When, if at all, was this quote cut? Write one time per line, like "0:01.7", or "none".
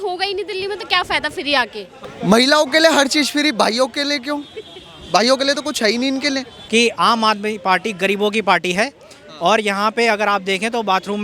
0:01.9
0:06.5